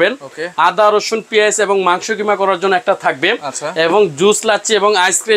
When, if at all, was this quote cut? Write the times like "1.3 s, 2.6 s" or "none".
none